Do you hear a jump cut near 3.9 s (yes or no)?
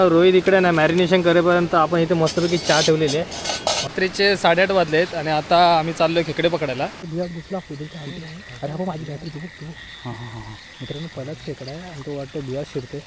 yes